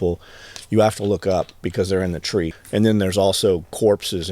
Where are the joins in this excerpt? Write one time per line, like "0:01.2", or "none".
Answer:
0:02.6